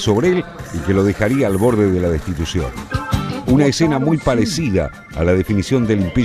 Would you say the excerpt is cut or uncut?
cut